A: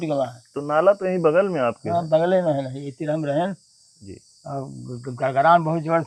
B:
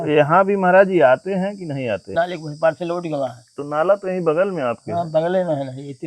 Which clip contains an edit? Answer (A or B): B